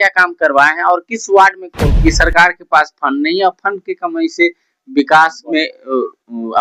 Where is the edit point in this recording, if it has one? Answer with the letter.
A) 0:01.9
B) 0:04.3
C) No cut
A